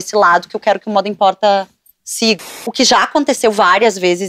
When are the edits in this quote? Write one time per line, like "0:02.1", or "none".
0:02.4